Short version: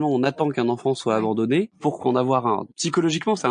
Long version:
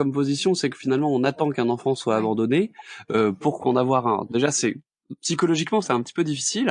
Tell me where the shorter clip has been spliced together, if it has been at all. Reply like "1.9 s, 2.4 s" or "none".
1.8 s, 2.7 s